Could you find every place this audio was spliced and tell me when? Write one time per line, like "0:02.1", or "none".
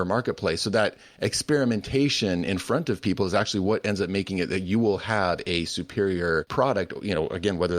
0:06.5

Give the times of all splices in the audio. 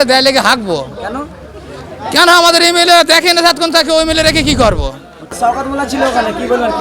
0:05.3

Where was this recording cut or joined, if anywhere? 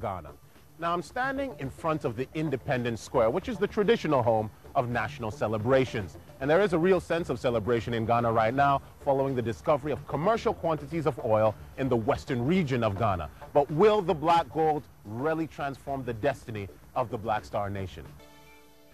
0:09.0

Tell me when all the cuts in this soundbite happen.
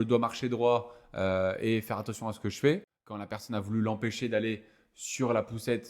0:03.4

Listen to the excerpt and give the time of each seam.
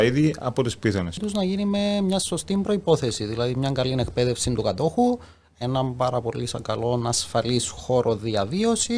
0:01.2

